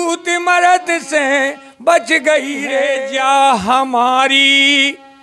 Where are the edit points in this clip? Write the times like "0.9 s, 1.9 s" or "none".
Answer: 2.9 s